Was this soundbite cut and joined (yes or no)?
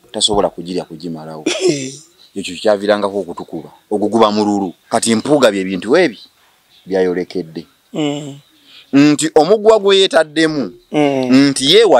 yes